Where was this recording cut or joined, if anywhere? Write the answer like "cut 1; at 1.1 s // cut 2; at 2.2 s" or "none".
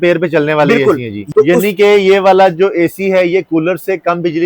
cut 1; at 1.2 s